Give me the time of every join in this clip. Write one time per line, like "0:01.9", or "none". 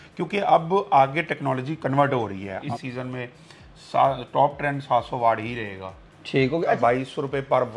0:02.6
0:06.8